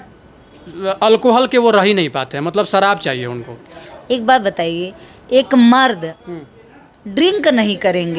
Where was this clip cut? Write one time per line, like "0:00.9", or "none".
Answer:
none